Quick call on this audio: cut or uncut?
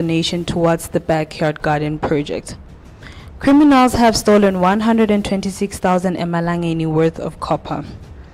uncut